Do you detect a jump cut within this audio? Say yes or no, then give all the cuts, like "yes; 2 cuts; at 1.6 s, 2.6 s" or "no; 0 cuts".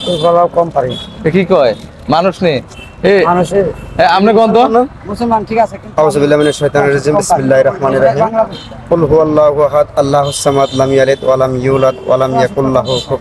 no; 0 cuts